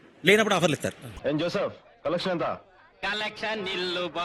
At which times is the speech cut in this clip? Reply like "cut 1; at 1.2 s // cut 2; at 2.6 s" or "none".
cut 1; at 1.2 s